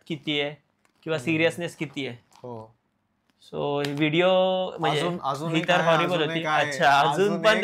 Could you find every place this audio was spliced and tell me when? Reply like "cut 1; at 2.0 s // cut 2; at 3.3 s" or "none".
none